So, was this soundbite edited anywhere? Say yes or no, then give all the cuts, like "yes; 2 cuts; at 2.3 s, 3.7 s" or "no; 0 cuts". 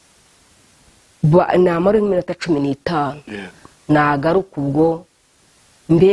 no; 0 cuts